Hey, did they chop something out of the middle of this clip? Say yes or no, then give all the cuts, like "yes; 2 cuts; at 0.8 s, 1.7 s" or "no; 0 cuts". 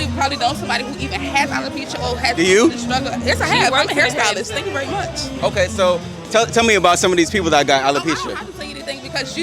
no; 0 cuts